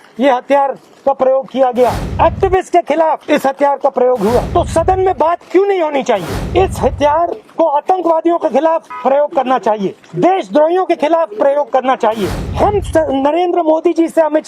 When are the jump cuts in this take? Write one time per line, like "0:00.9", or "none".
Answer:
0:02.0
0:03.2
0:04.5
0:06.4
0:07.4
0:08.9
0:10.0
0:12.4